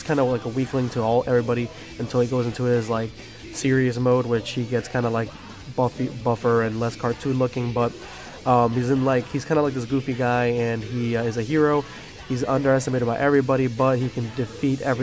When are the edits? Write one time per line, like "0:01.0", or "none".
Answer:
none